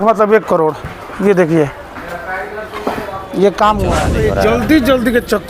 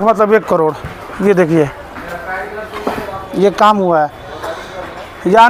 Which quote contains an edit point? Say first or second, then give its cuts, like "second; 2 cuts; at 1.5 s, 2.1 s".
first; 1 cut; at 4.1 s